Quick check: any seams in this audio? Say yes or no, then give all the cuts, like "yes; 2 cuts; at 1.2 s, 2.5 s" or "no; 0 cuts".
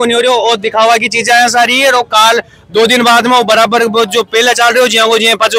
no; 0 cuts